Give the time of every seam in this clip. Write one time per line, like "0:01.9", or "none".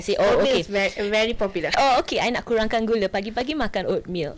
0:01.7